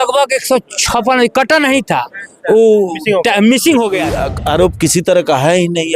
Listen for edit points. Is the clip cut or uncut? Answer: cut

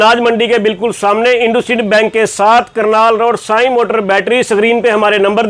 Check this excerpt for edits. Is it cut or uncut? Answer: uncut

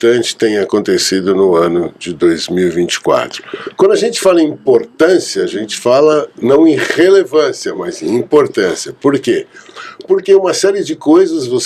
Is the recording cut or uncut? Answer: uncut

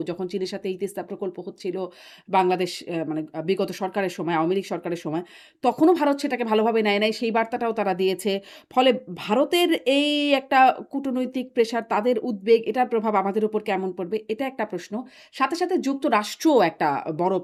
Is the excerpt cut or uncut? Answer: uncut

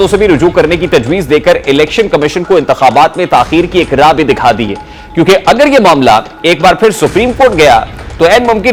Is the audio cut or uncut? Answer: uncut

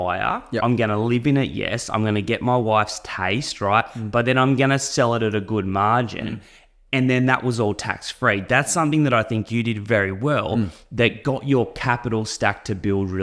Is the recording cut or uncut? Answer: uncut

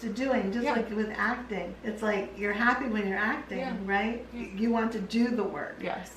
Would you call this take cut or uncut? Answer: cut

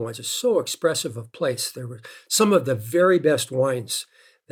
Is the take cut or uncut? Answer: uncut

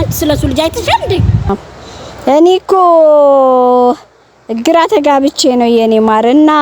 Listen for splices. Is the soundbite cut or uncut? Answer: cut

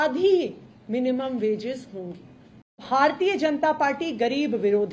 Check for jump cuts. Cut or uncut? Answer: cut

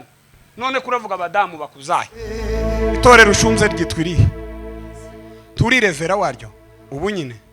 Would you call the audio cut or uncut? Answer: cut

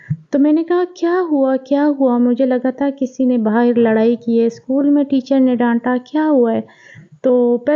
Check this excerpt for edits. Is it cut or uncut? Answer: uncut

